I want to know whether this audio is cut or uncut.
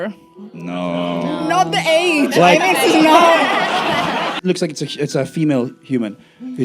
cut